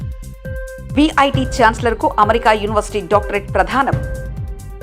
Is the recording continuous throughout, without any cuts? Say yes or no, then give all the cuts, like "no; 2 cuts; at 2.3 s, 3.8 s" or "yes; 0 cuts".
yes; 0 cuts